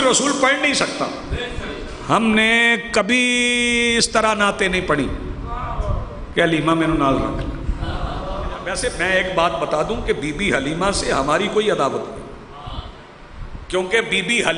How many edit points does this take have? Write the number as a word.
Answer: one